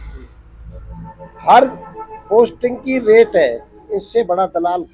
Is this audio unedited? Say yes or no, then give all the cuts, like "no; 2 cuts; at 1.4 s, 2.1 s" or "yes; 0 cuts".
yes; 0 cuts